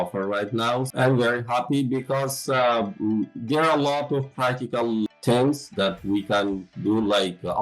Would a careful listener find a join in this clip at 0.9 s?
yes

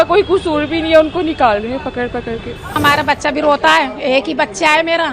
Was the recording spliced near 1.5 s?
no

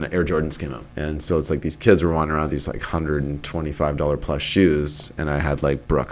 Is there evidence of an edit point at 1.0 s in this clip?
yes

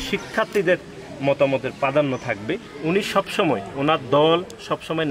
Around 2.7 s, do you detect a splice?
yes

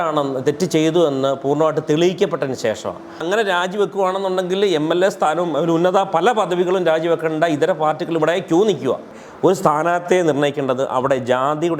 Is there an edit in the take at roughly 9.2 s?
yes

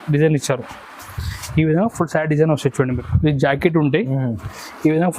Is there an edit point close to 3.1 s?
yes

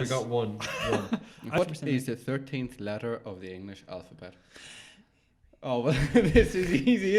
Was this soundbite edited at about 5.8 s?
no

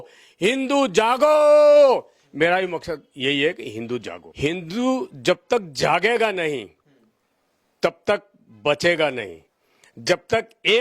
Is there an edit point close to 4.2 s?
yes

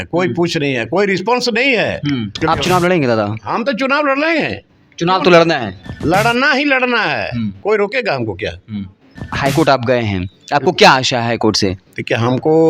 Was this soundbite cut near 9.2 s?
yes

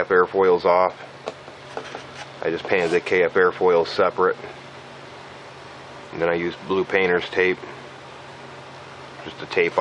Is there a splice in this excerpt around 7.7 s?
no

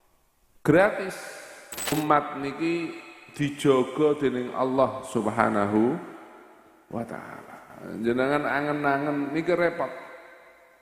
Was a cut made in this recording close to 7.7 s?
no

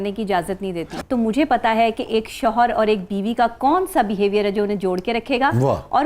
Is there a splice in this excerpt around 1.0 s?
yes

